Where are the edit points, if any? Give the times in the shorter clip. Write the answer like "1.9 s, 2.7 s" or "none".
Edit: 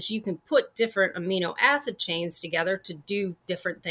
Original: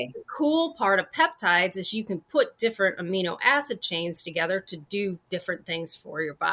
none